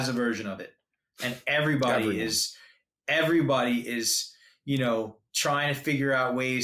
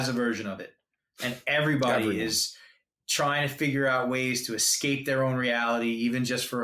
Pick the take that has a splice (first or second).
second